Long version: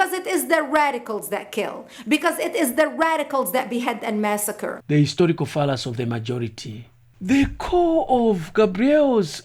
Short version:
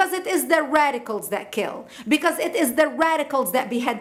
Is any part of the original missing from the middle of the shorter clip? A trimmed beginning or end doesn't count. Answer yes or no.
no